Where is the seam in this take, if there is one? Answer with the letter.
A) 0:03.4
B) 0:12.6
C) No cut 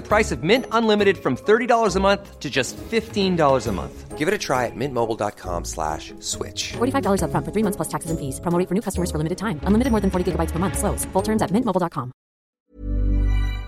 B